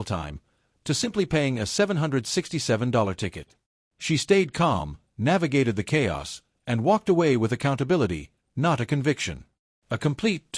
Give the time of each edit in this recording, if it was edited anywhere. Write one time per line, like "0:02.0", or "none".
none